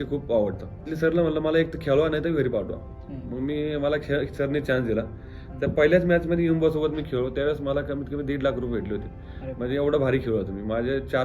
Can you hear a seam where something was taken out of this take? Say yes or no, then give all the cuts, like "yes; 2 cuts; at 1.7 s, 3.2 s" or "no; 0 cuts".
yes; 1 cut; at 0.9 s